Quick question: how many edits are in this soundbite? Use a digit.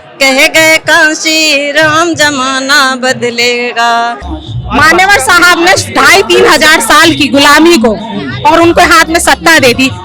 1